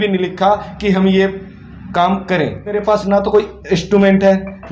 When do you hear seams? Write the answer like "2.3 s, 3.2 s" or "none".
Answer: 2.8 s